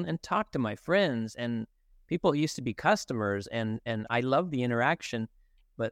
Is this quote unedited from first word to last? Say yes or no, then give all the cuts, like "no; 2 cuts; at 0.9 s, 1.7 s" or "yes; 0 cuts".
yes; 0 cuts